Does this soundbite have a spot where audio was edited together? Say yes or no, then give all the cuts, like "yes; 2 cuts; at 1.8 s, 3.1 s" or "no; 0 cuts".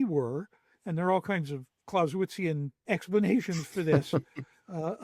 yes; 1 cut; at 2.8 s